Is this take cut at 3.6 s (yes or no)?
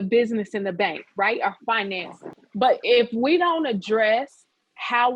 no